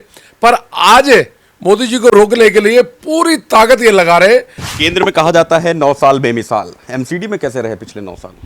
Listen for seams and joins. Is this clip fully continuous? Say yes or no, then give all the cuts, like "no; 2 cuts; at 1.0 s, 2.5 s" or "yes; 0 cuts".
no; 1 cut; at 4.6 s